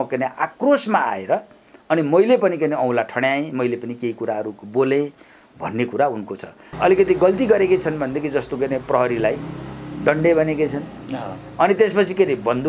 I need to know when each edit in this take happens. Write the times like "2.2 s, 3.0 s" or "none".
6.6 s